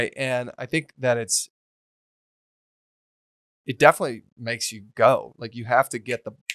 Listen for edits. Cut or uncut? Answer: uncut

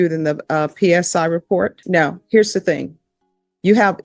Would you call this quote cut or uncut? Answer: cut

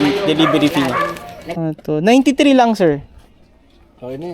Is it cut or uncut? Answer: cut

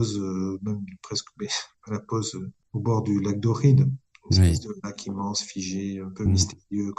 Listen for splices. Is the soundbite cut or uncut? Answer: cut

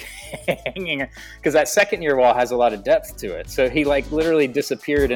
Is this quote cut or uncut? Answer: uncut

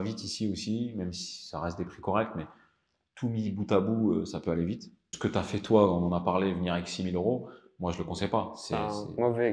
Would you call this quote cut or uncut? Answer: cut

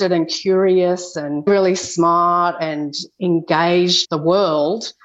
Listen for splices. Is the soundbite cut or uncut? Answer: cut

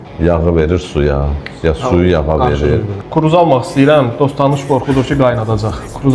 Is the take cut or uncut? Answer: cut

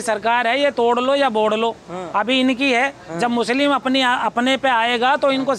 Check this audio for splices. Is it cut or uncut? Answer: uncut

